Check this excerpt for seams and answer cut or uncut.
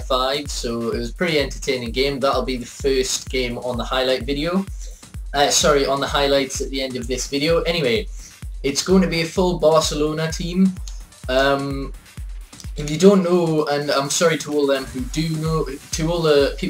uncut